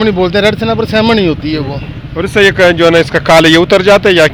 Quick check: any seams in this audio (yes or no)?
no